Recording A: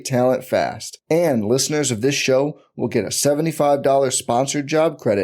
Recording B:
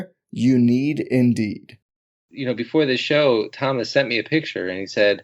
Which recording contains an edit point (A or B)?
B